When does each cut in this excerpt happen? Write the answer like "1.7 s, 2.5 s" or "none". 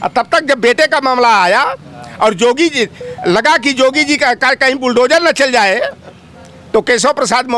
none